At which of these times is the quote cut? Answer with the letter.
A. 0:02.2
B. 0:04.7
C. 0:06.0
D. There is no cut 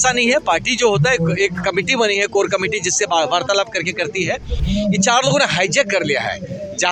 B